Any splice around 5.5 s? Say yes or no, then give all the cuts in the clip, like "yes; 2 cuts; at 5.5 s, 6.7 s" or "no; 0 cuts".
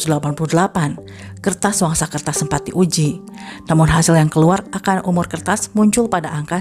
no; 0 cuts